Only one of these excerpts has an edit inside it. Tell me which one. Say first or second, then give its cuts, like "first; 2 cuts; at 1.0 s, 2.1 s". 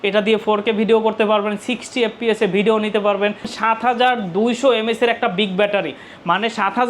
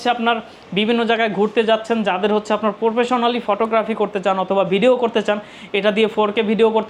first; 1 cut; at 3.5 s